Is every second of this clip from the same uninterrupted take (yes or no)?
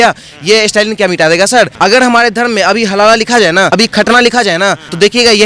no